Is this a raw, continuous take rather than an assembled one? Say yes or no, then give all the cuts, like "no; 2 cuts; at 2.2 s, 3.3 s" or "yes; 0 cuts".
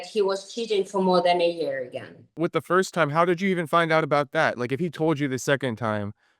no; 1 cut; at 2.4 s